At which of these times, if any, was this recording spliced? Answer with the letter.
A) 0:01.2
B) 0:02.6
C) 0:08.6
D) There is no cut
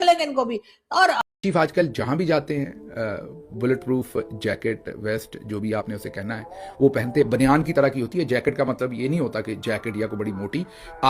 A